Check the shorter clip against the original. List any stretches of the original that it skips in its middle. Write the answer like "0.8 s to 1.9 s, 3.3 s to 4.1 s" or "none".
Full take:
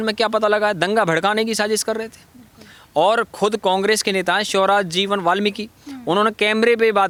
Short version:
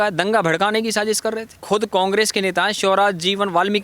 2.2 s to 3.3 s

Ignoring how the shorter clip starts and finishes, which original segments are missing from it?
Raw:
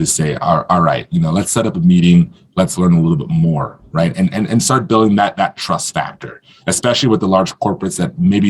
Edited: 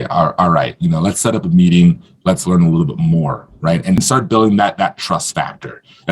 4.3 s to 4.6 s

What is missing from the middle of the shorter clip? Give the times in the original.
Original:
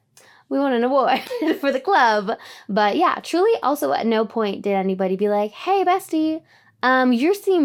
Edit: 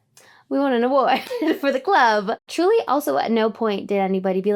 2.5 s to 3.2 s

